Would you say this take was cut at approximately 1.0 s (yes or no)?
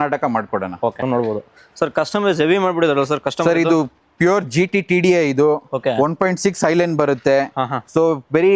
yes